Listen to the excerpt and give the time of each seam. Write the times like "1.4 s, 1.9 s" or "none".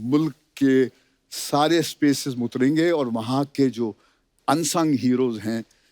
none